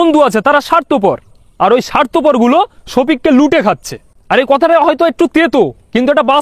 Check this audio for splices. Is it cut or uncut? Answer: uncut